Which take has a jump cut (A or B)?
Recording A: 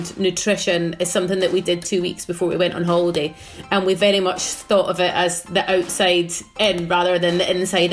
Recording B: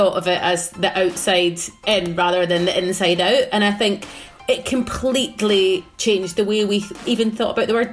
B